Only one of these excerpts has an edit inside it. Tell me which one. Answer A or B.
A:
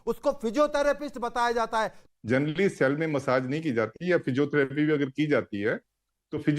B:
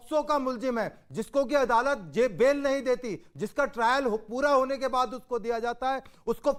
A